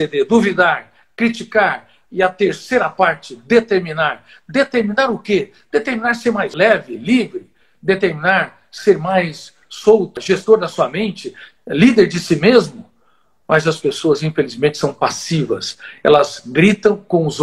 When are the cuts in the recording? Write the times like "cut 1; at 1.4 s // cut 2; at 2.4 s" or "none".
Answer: cut 1; at 6.5 s // cut 2; at 10.2 s